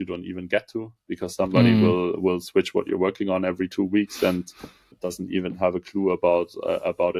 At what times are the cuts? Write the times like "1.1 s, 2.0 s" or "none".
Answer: 4.9 s